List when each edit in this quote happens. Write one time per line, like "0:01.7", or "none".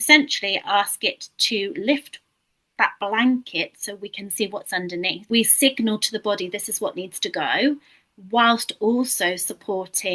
0:05.2

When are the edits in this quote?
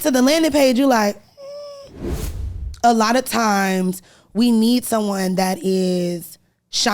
0:02.3

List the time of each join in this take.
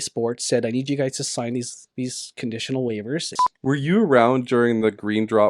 0:03.3

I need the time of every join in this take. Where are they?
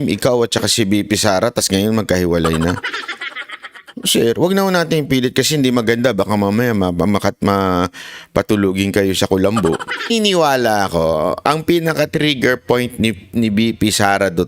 0:10.1

